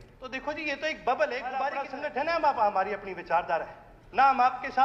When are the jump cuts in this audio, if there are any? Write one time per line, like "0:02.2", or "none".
0:01.8